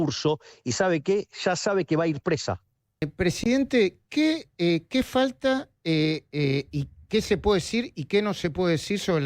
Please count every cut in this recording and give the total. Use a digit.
1